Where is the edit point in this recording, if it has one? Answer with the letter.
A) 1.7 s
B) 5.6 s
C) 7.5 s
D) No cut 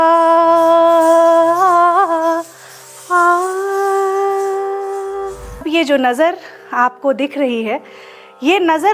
B